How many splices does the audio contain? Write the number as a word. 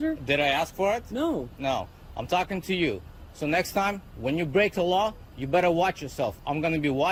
zero